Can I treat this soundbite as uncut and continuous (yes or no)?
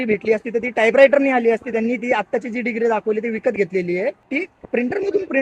no